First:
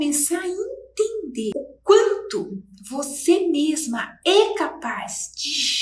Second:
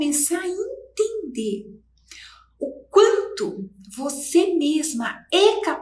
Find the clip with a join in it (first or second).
first